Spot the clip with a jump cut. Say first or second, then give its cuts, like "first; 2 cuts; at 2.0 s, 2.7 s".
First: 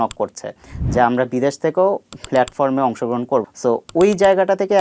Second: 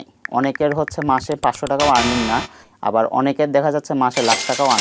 first; 1 cut; at 3.5 s